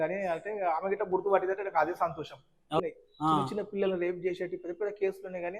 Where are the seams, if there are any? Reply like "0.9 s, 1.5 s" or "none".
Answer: 2.8 s